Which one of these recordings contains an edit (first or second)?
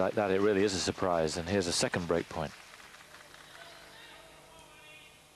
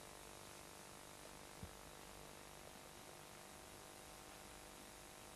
second